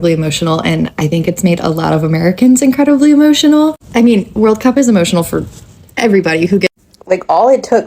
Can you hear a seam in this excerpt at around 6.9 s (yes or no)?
yes